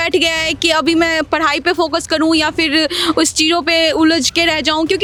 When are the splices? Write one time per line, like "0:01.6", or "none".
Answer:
none